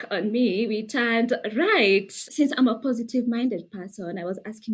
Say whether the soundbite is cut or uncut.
cut